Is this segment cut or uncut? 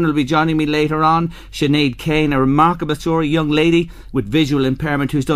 uncut